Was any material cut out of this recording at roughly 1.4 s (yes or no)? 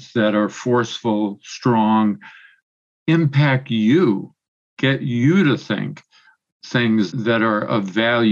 no